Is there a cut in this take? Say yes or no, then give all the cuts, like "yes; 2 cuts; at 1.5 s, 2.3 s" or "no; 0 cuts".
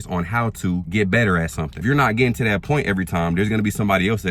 yes; 2 cuts; at 0.9 s, 1.8 s